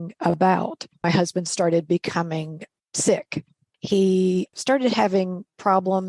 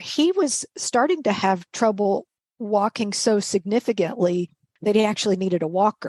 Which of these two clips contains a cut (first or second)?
first